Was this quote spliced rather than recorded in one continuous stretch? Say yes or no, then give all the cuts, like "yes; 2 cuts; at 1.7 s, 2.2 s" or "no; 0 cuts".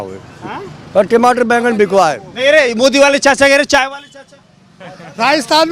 no; 0 cuts